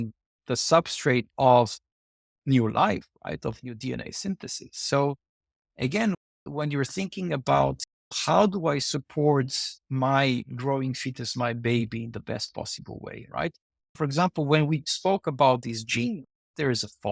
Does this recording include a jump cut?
no; 0 cuts

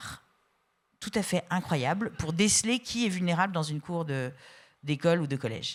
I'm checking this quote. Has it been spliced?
no; 0 cuts

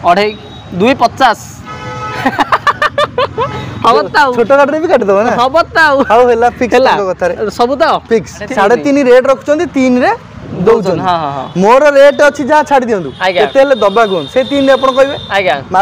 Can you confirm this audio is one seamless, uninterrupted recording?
no; 1 cut; at 8.4 s

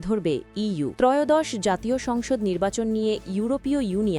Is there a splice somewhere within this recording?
yes; 1 cut; at 0.9 s

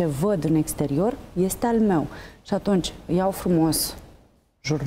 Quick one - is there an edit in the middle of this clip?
no; 0 cuts

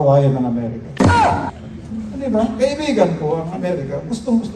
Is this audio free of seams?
yes; 0 cuts

